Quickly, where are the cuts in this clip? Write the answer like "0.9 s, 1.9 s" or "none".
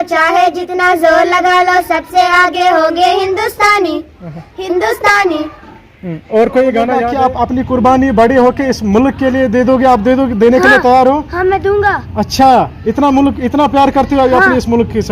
7.1 s